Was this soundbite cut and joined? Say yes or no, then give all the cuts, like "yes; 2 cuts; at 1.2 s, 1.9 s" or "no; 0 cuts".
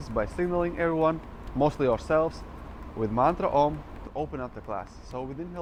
no; 0 cuts